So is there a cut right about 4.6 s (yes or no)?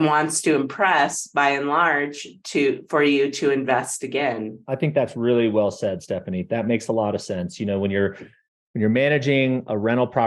yes